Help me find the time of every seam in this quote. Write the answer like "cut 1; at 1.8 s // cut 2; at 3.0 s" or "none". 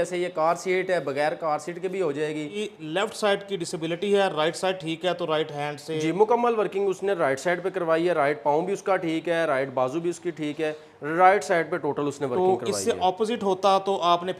cut 1; at 2.6 s